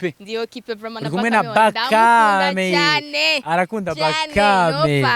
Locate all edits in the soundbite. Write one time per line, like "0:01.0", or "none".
none